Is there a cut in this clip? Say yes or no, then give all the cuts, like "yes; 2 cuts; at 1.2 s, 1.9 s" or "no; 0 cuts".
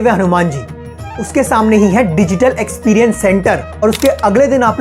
yes; 1 cut; at 3.7 s